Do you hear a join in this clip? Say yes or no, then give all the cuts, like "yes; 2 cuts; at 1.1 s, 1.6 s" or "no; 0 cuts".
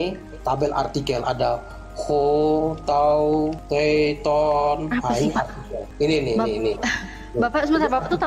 no; 0 cuts